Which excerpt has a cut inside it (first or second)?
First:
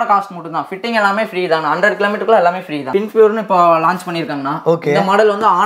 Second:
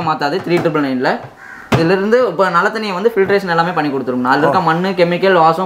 first